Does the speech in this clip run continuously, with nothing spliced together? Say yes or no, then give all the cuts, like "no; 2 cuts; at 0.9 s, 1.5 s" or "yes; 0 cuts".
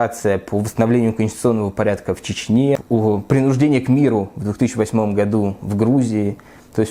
no; 1 cut; at 2.8 s